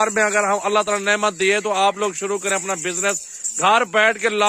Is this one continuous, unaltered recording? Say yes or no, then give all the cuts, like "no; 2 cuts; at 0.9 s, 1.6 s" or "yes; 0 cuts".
yes; 0 cuts